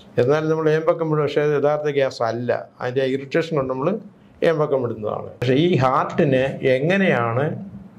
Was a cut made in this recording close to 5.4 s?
yes; 1 cut; at 5.4 s

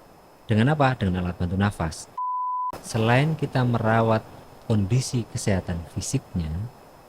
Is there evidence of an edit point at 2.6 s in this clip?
yes; 1 cut; at 2.6 s

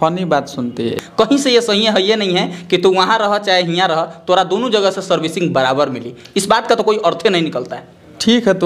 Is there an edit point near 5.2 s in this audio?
no; 1 cut; at 1.0 s

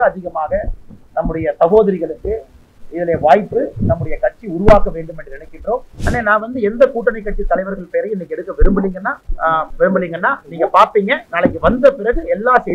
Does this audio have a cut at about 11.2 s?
yes; 3 cuts; at 5.9 s, 9.6 s, 11.2 s

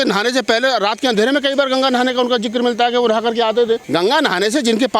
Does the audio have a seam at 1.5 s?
no; 1 cut; at 3.8 s

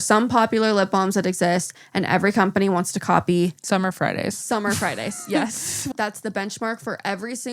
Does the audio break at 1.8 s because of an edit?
no; 1 cut; at 5.9 s

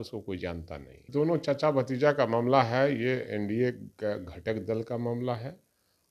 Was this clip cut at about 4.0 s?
no; 1 cut; at 1.0 s

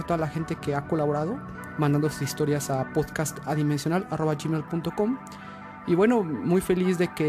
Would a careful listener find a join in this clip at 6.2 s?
yes; 1 cut; at 6.2 s

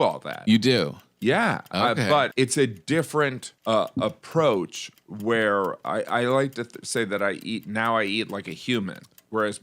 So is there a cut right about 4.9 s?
no; 2 cuts; at 2.3 s, 3.5 s

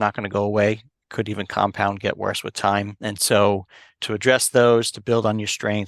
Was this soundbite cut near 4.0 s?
yes; 2 cuts; at 2.9 s, 4.0 s

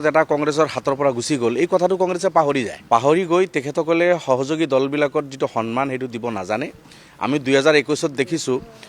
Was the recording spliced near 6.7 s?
no; 1 cut; at 2.8 s

